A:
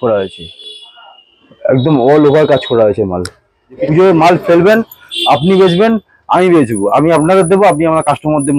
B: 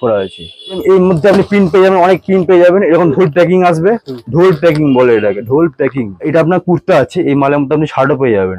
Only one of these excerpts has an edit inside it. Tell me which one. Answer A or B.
B